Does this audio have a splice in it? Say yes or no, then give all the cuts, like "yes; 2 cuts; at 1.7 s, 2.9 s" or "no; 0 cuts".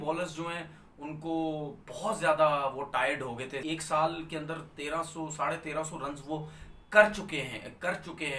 yes; 1 cut; at 3.6 s